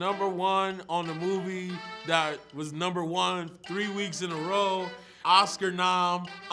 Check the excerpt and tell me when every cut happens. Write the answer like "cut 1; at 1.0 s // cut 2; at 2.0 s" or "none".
cut 1; at 5.1 s

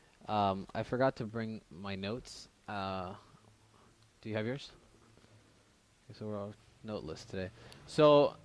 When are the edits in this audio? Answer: none

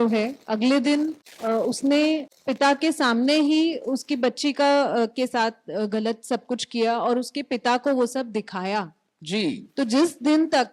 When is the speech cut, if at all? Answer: cut 1; at 1.3 s // cut 2; at 2.4 s

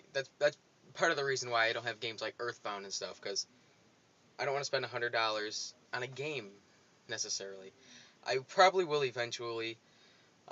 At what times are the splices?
cut 1; at 3.1 s

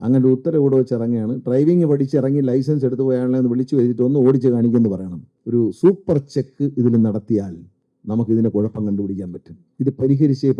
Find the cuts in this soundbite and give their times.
cut 1; at 5.4 s

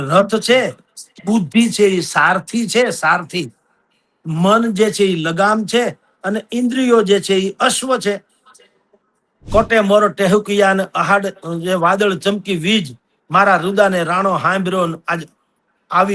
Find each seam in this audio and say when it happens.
cut 1; at 9.4 s

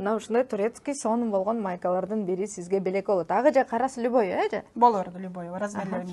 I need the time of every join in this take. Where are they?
none

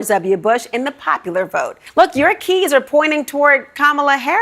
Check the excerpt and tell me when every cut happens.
cut 1; at 1.8 s

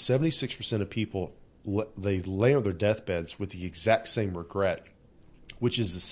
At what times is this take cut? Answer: none

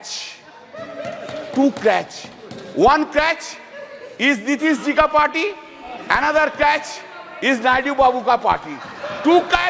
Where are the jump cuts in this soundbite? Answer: none

